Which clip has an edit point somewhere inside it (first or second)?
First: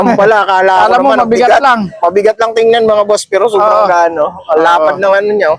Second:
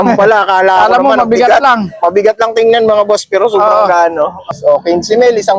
second